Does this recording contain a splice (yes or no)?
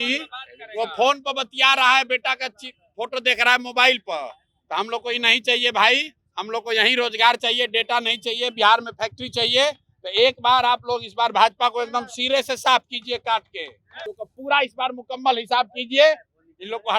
yes